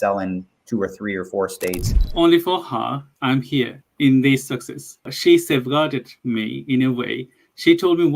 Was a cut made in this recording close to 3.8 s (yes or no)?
yes